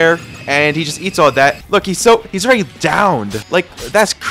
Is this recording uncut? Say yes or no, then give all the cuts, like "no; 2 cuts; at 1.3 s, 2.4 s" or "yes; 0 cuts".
no; 2 cuts; at 1.6 s, 3.4 s